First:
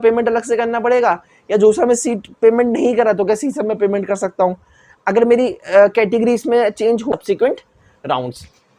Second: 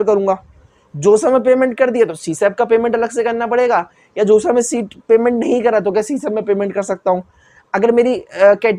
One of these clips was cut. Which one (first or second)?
first